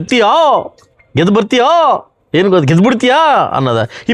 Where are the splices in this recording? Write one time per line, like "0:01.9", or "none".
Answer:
none